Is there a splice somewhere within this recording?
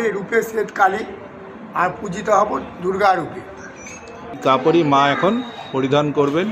yes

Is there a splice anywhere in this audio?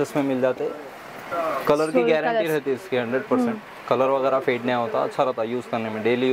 no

